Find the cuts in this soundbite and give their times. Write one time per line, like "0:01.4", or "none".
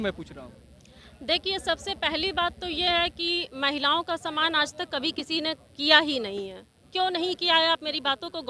none

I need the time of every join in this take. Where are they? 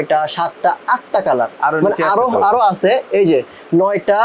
none

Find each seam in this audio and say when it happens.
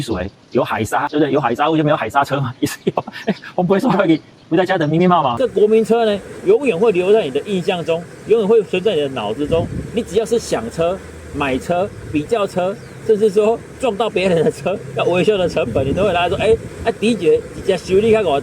0:05.4

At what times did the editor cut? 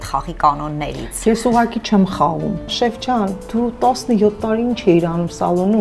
0:02.7

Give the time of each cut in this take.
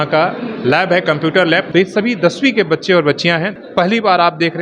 0:01.7
0:03.5

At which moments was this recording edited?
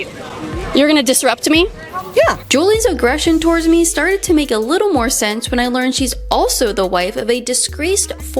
none

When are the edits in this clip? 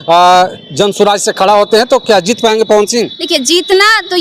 none

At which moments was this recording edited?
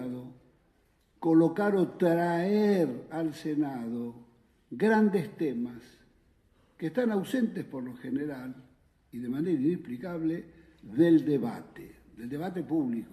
0:04.1

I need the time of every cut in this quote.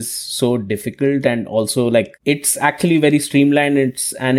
0:02.1

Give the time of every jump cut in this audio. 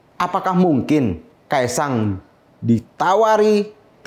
0:01.3

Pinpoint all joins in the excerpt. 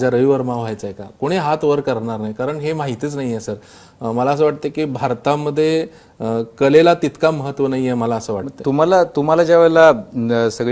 none

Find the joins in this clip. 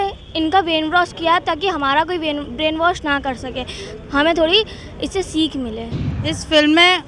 0:05.8

